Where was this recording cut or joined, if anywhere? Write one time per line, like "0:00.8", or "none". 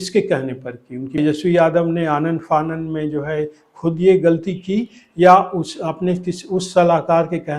0:01.1